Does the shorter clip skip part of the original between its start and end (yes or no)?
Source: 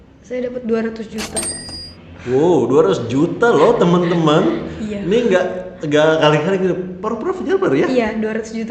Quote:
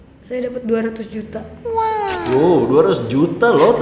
no